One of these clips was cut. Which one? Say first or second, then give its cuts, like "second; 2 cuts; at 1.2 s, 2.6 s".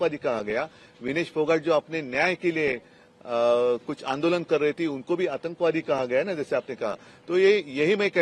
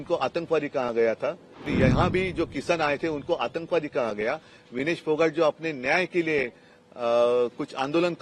second; 1 cut; at 1.7 s